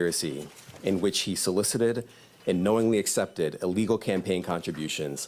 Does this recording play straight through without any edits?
yes; 0 cuts

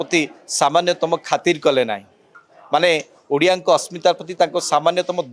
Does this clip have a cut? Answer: no; 0 cuts

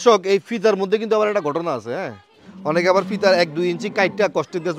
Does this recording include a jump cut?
no; 0 cuts

